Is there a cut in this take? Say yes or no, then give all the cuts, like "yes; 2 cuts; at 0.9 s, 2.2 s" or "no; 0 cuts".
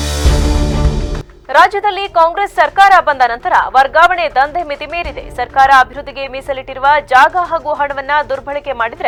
no; 0 cuts